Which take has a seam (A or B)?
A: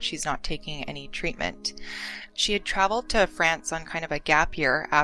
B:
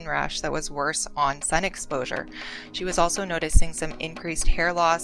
A